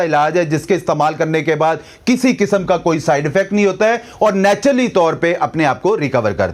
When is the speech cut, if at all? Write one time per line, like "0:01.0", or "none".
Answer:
none